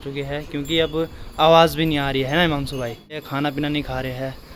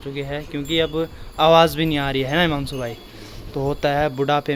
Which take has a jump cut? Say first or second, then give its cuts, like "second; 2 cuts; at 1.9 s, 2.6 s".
first; 1 cut; at 3.3 s